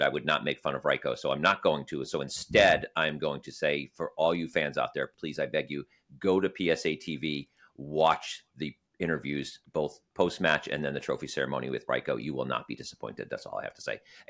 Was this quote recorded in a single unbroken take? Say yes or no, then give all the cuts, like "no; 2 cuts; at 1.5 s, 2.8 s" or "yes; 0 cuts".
yes; 0 cuts